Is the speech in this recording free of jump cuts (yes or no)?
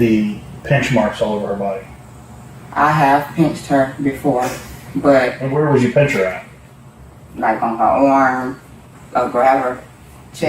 no